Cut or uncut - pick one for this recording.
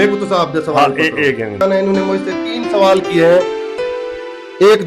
cut